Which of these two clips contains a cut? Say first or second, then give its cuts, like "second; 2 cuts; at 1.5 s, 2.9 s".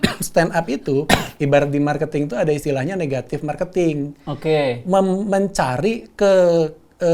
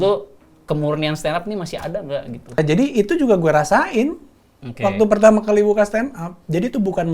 second; 1 cut; at 2.6 s